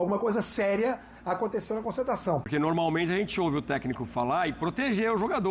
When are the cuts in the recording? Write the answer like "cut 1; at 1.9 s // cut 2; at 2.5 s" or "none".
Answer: cut 1; at 2.5 s